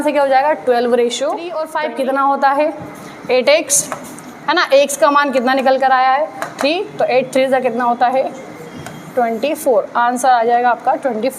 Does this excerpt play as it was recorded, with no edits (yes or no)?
no